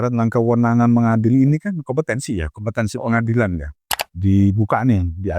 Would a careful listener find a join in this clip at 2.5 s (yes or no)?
no